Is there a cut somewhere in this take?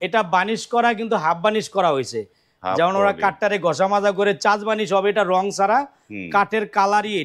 no; 0 cuts

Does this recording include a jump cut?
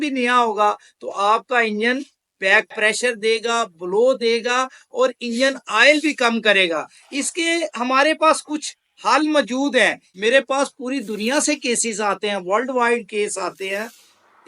yes; 1 cut; at 10.1 s

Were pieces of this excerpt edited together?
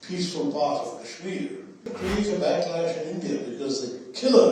yes; 1 cut; at 1.9 s

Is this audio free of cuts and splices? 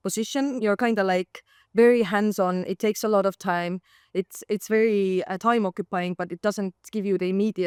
yes; 0 cuts

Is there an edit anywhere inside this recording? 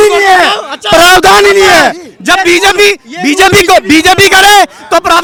no; 0 cuts

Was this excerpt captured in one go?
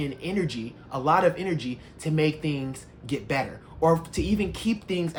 yes; 0 cuts

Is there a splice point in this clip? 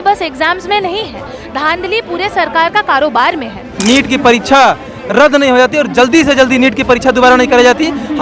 yes; 1 cut; at 3.7 s

